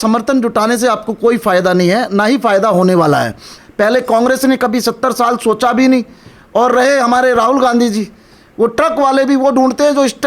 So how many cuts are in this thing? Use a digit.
1